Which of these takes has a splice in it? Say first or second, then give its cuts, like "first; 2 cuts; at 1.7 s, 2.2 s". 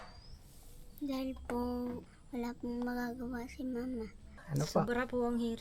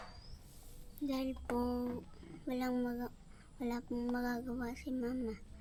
first; 2 cuts; at 2.1 s, 4.3 s